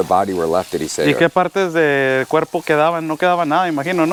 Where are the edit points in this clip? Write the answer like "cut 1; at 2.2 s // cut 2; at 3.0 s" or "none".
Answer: none